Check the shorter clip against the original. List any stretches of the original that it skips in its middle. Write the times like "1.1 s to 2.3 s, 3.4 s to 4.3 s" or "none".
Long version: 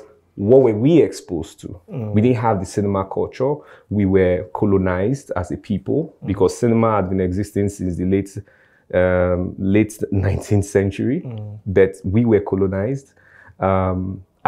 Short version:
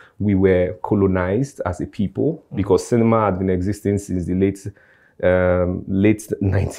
none